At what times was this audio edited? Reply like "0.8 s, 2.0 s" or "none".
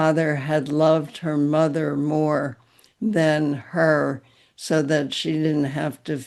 none